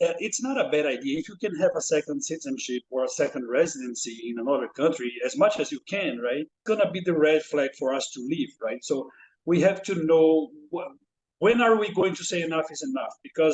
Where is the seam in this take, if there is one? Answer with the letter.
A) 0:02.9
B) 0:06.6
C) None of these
B